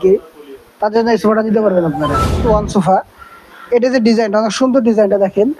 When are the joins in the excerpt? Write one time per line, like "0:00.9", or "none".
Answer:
0:02.4